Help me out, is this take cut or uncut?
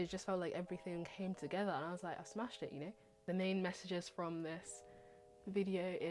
cut